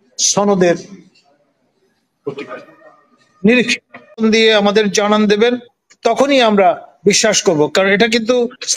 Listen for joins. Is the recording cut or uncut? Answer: cut